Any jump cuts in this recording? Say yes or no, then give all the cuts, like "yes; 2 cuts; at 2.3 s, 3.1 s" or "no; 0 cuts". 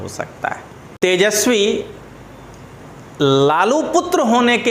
yes; 1 cut; at 1.0 s